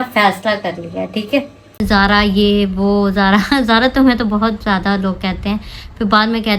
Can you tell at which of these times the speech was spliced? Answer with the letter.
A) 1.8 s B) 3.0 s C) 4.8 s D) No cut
A